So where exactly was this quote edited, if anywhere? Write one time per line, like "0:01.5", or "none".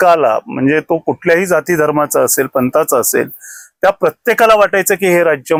none